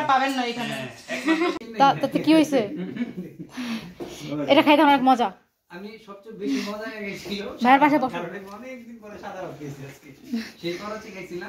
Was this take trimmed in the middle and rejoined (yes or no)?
yes